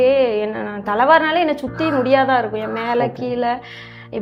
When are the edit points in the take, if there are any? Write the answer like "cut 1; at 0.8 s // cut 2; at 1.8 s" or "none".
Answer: none